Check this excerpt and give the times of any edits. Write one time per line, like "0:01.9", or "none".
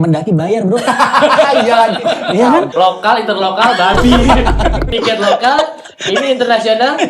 0:02.7
0:04.9